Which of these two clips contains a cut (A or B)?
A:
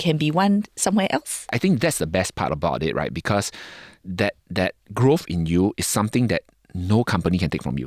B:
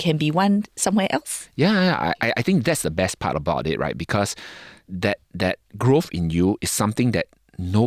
A